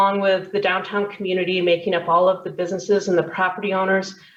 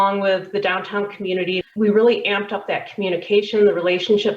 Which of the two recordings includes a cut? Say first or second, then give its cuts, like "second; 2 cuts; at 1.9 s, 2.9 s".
second; 1 cut; at 1.6 s